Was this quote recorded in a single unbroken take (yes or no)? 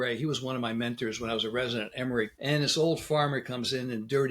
no